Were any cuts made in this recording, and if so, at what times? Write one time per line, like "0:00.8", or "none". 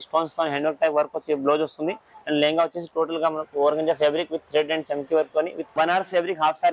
0:05.7